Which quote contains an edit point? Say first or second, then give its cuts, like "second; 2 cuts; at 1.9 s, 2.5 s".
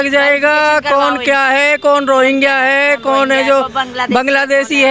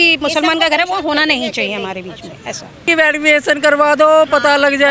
second; 1 cut; at 2.8 s